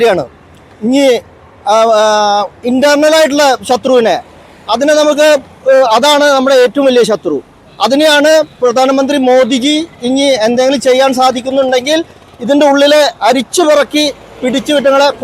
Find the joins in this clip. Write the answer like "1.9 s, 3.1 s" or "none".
none